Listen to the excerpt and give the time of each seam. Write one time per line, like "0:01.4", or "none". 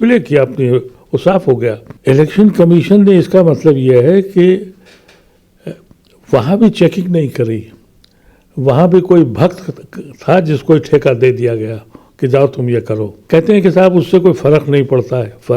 0:01.9
0:13.1